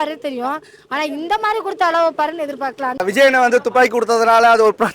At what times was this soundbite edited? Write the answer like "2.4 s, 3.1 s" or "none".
3.0 s